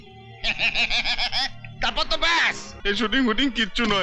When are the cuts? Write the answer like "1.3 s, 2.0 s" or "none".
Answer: 2.7 s